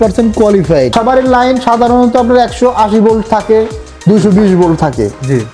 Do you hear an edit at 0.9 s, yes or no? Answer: yes